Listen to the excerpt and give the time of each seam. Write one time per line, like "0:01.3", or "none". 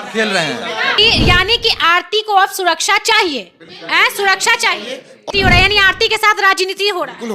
0:01.0
0:05.2